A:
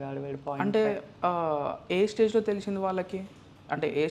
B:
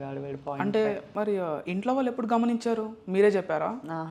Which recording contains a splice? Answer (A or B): B